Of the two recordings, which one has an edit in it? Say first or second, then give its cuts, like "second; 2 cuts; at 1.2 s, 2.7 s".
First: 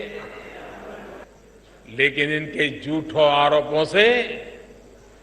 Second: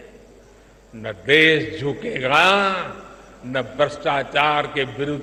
first; 1 cut; at 1.2 s